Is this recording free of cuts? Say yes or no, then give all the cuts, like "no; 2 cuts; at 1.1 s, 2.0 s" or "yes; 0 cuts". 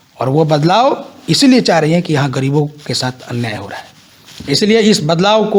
yes; 0 cuts